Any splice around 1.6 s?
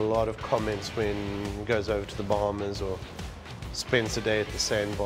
no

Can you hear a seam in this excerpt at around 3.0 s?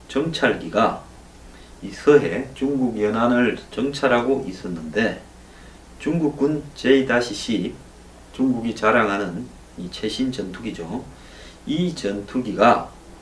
no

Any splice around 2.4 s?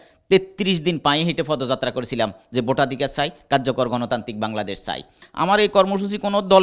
no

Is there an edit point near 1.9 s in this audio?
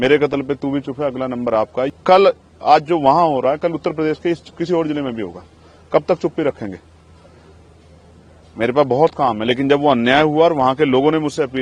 yes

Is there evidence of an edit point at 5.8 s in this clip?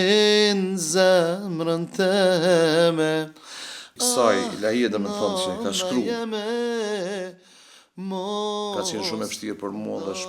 no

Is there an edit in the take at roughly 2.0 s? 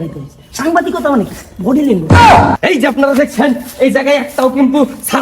yes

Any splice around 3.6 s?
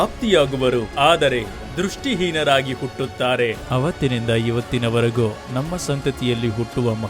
yes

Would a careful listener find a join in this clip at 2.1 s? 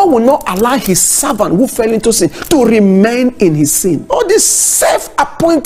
no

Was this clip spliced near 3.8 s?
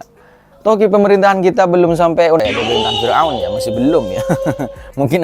no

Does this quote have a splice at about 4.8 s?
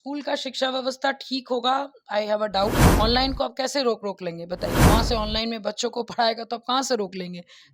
yes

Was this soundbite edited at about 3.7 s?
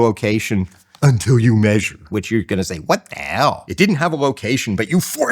yes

